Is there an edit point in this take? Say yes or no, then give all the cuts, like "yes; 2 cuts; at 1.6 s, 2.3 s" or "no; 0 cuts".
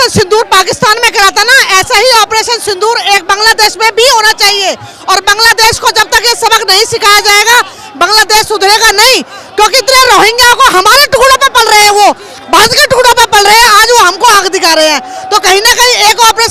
no; 0 cuts